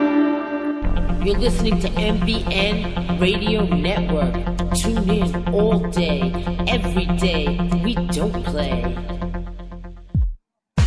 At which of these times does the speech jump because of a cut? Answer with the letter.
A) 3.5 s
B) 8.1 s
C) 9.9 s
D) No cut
C